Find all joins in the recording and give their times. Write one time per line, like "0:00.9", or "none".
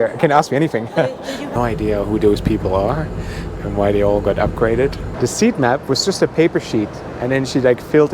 0:01.5
0:05.1